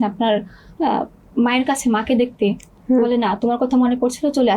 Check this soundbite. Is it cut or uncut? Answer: uncut